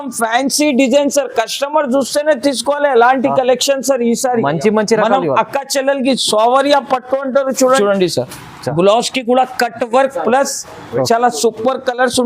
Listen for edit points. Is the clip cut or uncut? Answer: cut